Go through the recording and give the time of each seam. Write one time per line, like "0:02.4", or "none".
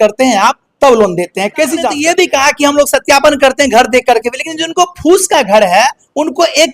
0:02.0